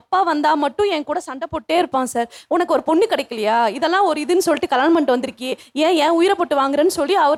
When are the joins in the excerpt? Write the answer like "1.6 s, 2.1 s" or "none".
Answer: none

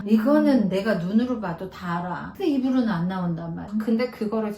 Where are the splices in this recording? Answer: 3.7 s

